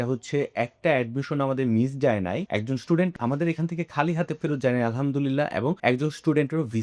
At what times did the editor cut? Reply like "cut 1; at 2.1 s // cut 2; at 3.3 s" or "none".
cut 1; at 2.4 s